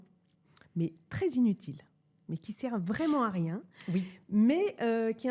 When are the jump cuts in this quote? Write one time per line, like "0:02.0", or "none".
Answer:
none